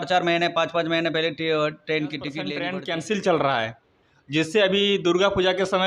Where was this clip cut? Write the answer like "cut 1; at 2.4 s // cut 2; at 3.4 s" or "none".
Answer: cut 1; at 2.6 s